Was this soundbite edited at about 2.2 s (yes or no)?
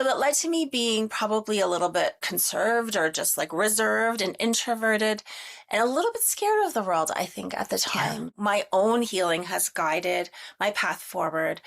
yes